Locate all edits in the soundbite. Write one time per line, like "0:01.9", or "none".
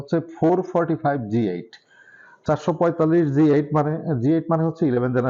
none